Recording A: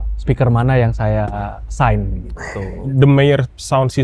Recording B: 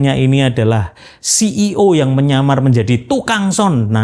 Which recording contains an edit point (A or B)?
A